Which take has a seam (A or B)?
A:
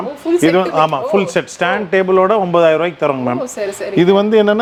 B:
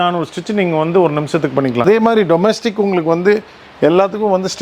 B